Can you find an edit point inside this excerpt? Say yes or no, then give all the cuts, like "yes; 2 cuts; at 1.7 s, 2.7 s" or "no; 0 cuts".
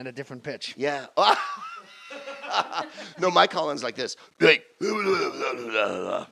yes; 1 cut; at 3.1 s